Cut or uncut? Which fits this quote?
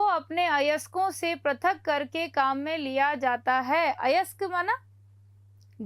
uncut